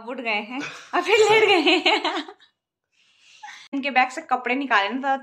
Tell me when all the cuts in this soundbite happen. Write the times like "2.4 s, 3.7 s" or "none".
3.7 s